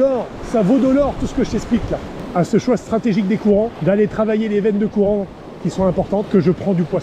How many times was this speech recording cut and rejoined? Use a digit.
3